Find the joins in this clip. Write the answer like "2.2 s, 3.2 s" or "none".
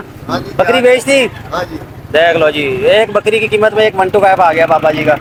none